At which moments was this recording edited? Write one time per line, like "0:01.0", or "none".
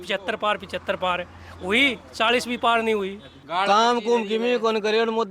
0:03.4